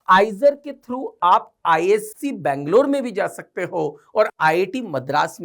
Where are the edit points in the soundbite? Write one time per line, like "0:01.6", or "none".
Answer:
none